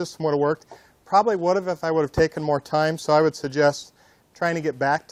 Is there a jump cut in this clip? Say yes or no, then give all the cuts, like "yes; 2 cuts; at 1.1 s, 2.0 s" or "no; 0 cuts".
yes; 1 cut; at 1.4 s